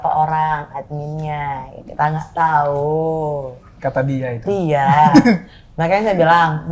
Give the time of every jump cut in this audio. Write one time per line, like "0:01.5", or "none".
none